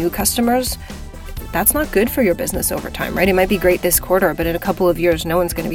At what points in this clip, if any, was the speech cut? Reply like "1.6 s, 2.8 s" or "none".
none

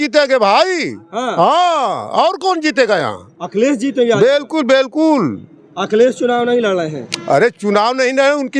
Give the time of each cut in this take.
none

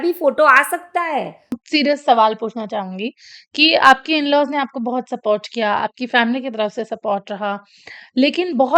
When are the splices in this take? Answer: 1.6 s

